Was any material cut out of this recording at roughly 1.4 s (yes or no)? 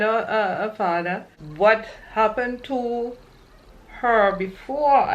yes